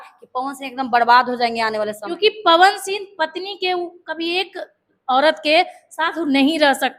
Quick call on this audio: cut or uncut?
cut